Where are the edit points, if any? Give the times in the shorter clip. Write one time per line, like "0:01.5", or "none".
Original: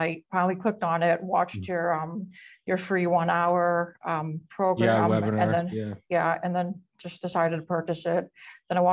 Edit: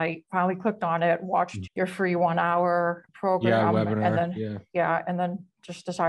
0:01.6
0:03.1